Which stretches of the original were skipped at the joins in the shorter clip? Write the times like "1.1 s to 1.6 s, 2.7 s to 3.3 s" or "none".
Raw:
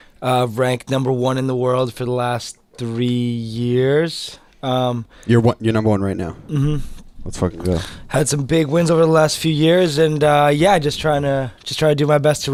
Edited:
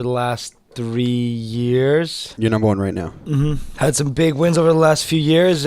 4.4 s to 5.6 s, 6.9 s to 8.0 s